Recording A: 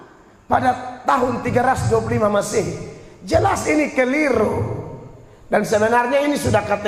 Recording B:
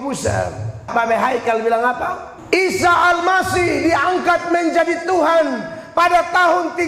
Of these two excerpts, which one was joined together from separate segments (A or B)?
B